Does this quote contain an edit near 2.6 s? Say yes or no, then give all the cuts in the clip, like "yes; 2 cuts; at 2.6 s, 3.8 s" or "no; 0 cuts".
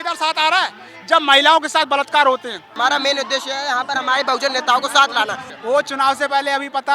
yes; 2 cuts; at 2.6 s, 5.5 s